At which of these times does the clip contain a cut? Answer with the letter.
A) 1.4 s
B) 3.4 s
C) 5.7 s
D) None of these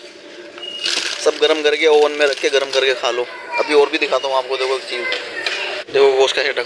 C